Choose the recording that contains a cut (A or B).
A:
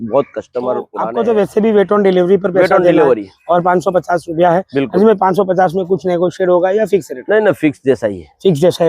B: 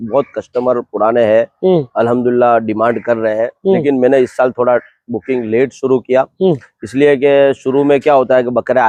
A